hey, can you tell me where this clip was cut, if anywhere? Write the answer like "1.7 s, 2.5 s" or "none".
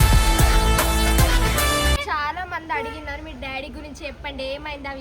2.0 s